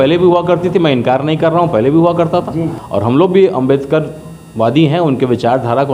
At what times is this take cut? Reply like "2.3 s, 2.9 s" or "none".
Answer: 2.8 s